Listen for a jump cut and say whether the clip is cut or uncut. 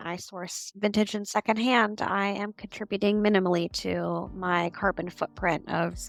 uncut